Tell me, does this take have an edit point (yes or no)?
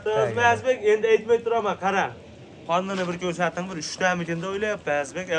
no